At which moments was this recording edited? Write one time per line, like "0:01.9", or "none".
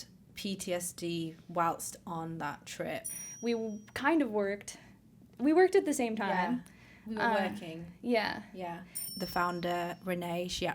0:03.2
0:09.1